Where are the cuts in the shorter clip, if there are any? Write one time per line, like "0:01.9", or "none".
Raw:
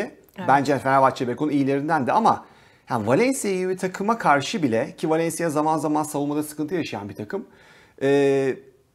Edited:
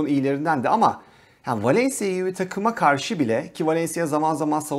none